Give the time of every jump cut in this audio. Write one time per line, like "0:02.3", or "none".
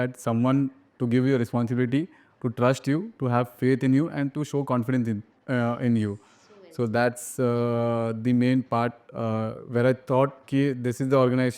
none